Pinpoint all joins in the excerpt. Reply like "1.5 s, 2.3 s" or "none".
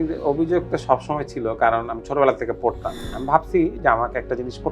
3.0 s